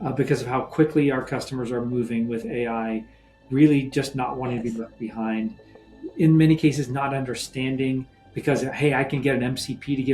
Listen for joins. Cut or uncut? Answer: uncut